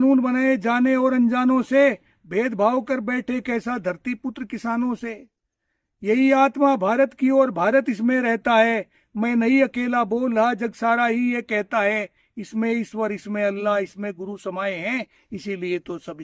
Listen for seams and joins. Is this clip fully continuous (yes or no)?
yes